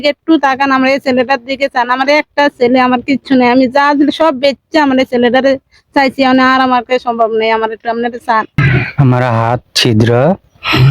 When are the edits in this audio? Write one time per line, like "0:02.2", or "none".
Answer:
0:08.5